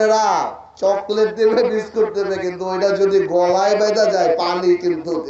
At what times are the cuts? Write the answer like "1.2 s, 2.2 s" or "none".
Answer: none